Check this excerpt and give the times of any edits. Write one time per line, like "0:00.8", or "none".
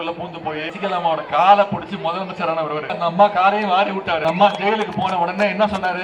0:00.7
0:03.0
0:04.2